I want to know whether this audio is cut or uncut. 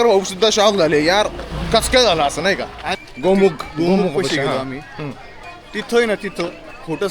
cut